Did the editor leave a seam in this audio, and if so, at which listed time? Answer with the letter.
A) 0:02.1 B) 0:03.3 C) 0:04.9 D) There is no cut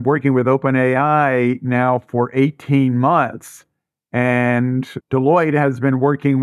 D